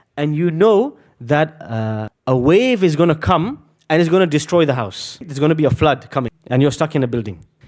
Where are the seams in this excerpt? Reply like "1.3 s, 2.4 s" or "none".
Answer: 6.3 s